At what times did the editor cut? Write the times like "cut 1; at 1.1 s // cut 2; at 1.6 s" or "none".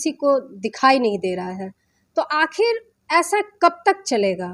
none